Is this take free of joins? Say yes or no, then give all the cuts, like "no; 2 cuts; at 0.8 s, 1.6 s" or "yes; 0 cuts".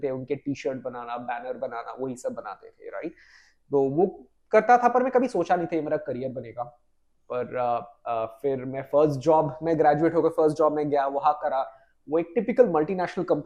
yes; 0 cuts